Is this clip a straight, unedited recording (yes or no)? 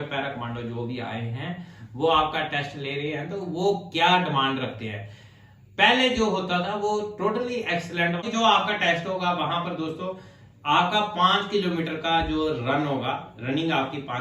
no